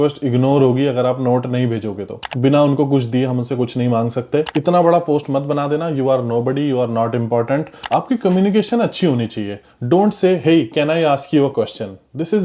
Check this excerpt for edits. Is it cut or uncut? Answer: cut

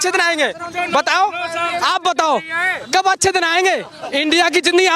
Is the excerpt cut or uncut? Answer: cut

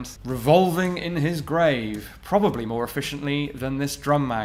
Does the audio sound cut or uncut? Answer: uncut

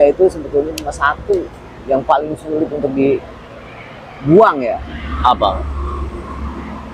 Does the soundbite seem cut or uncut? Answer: uncut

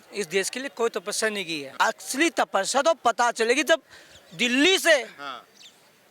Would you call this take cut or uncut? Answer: cut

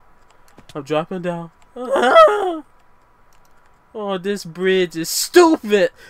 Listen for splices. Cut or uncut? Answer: uncut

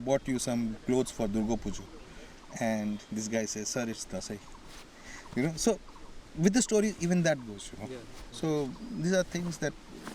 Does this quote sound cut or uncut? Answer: uncut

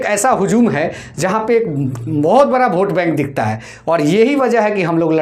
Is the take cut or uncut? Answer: uncut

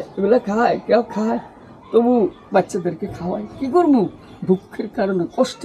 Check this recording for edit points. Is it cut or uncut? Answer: uncut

